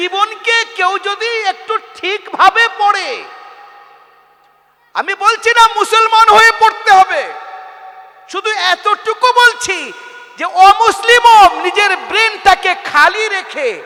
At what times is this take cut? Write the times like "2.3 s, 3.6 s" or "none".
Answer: none